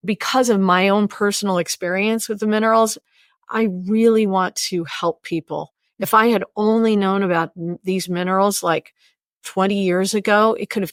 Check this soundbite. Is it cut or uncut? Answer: uncut